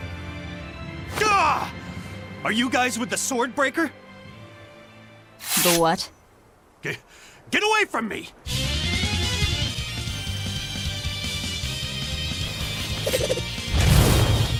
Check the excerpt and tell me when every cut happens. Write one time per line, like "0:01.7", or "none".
none